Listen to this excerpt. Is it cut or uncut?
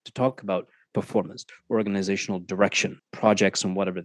cut